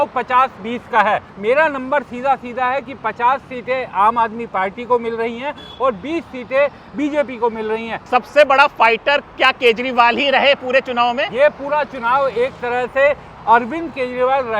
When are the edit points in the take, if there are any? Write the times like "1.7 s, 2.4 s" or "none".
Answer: 1.3 s, 8.0 s, 11.3 s